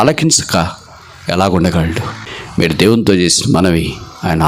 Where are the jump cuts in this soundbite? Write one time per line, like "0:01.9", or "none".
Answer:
0:02.1